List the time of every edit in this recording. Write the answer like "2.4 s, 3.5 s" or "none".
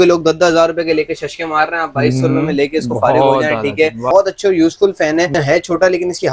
4.1 s, 5.3 s